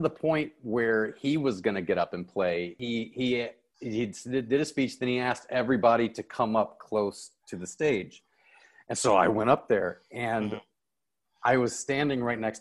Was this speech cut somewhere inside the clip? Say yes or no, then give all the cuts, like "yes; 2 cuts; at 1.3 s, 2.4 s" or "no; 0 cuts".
yes; 1 cut; at 2.8 s